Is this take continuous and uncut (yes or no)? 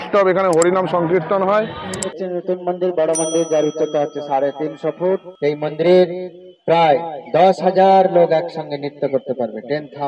no